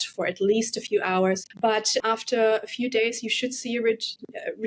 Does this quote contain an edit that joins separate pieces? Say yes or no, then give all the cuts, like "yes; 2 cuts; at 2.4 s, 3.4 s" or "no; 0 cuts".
yes; 1 cut; at 1.8 s